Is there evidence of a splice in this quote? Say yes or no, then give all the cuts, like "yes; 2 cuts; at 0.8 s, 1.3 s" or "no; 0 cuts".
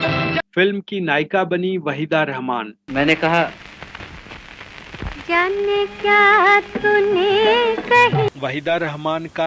yes; 1 cut; at 8.4 s